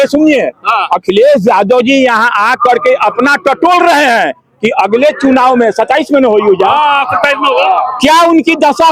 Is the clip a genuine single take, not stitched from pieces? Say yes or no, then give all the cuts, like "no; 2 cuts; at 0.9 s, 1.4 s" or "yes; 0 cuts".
yes; 0 cuts